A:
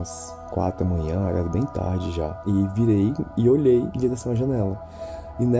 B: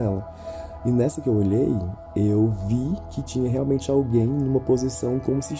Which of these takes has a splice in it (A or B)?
A